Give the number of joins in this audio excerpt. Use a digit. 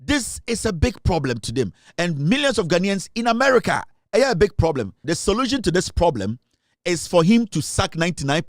1